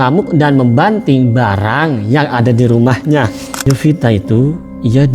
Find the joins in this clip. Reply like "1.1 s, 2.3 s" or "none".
3.6 s